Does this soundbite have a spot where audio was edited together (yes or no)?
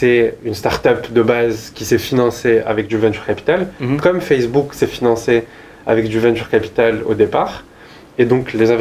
no